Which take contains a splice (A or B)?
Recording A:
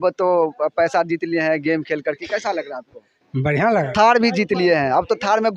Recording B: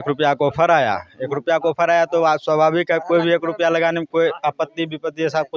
A